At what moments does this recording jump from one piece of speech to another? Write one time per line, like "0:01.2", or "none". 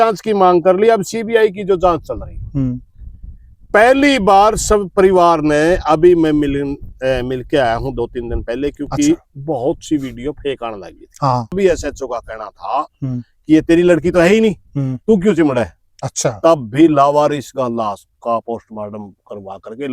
0:11.5